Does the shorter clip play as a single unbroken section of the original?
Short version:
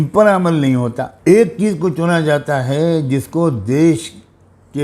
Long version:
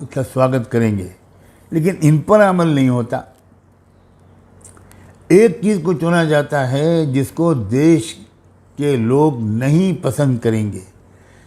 no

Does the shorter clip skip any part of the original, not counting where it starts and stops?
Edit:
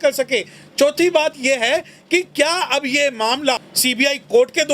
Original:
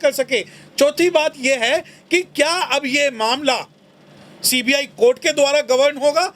yes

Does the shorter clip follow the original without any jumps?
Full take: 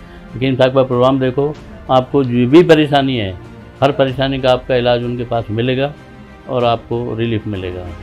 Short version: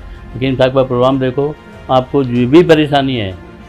yes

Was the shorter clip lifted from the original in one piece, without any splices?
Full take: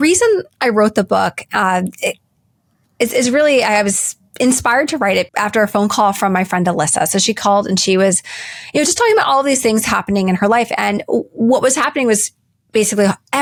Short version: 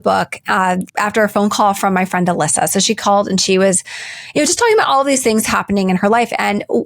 no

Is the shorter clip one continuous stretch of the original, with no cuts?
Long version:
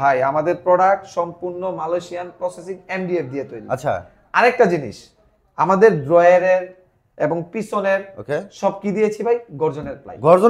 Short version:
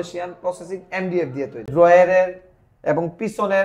no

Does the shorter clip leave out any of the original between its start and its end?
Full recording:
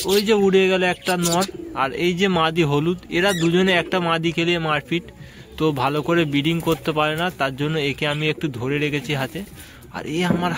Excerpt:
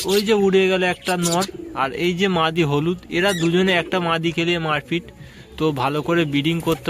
no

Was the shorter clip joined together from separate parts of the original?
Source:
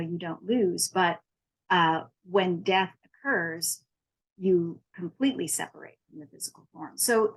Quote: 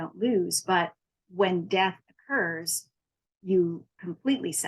yes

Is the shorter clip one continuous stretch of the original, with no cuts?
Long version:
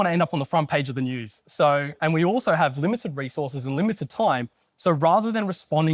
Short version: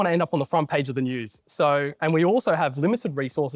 yes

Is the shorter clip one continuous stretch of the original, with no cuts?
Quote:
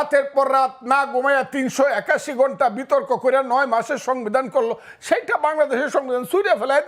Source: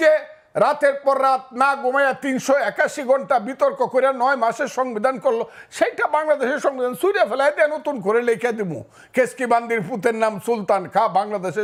yes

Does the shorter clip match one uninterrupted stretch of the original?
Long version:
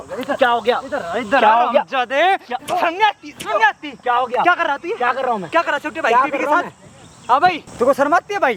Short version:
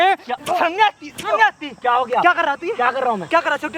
yes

